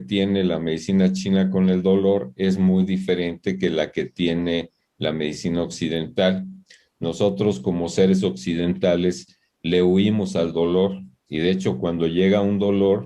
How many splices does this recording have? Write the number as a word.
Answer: zero